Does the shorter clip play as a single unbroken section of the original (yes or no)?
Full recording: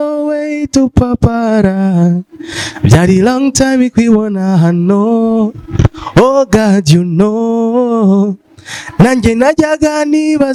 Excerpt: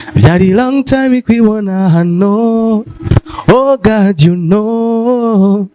yes